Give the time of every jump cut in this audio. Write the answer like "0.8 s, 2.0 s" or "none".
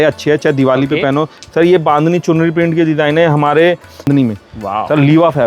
4.1 s